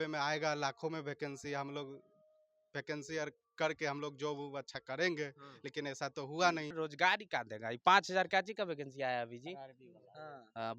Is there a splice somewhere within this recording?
yes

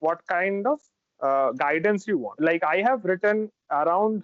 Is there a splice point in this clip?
yes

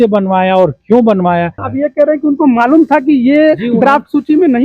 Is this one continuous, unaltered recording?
no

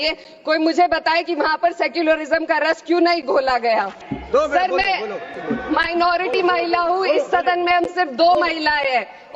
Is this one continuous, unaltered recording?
no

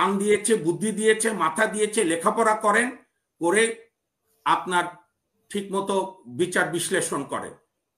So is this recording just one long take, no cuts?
yes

